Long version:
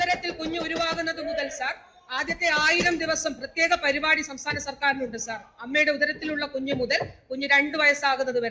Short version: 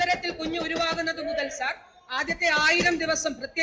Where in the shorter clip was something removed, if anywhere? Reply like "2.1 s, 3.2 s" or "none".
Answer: none